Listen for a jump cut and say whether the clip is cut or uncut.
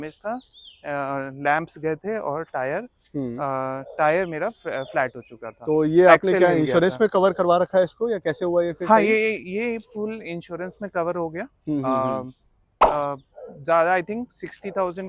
uncut